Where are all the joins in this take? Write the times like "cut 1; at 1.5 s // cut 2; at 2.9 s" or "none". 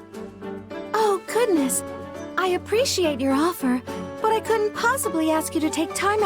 cut 1; at 0.9 s